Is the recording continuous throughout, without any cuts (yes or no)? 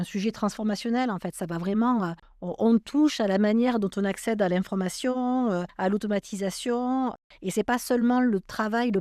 yes